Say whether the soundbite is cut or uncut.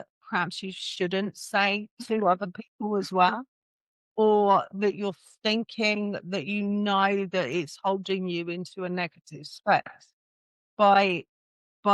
uncut